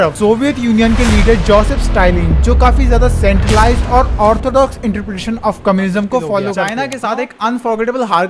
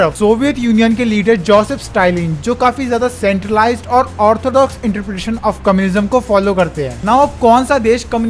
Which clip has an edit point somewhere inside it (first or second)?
first